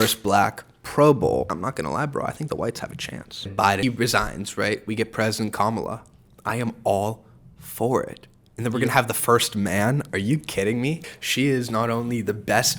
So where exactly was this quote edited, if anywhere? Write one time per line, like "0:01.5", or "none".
0:01.5
0:03.8
0:11.1